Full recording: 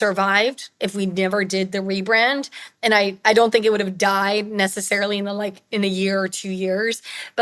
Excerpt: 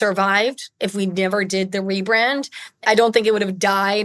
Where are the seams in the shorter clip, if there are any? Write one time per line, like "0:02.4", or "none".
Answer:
0:02.8